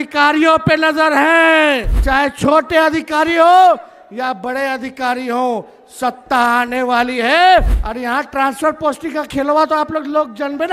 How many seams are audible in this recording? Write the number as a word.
two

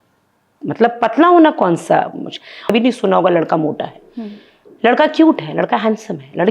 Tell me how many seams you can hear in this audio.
one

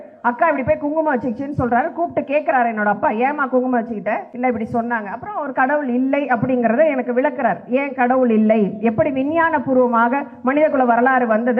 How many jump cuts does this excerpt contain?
one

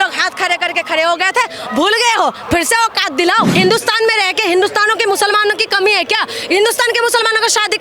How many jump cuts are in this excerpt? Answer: one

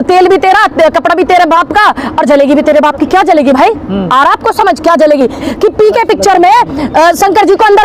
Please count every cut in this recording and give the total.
one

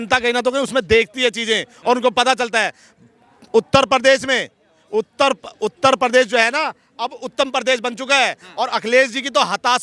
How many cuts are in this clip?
zero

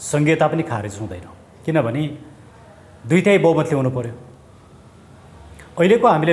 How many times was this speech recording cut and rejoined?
zero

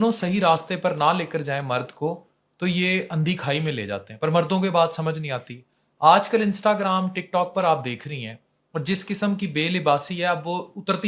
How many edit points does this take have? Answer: zero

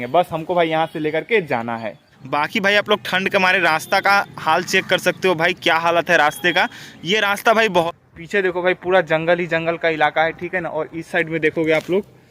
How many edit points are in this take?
two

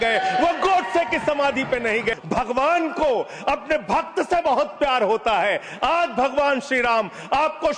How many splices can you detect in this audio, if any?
one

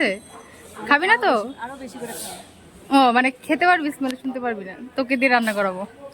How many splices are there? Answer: one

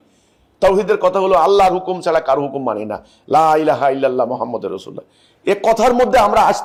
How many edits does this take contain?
zero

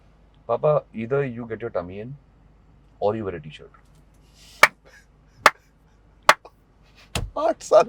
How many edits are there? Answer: zero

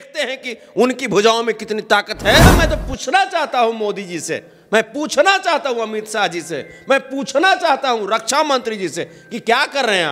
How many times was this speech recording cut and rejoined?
one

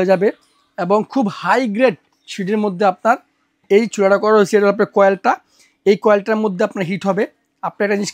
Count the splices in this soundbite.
zero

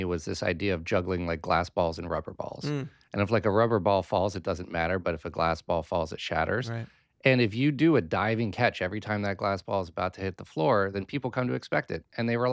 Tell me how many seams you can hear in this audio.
zero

